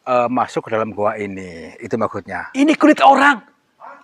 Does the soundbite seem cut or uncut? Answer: cut